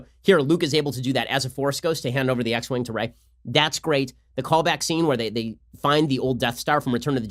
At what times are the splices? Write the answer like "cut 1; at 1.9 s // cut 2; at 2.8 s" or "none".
none